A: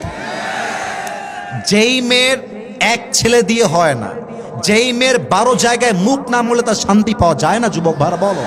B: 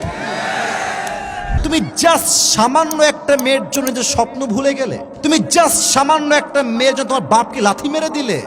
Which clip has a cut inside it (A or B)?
B